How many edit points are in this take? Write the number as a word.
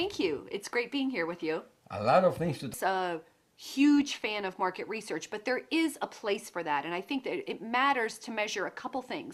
zero